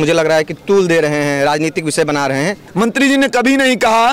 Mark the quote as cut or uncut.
cut